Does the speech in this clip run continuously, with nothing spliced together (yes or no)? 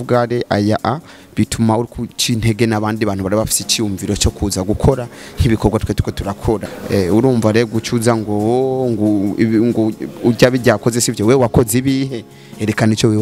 no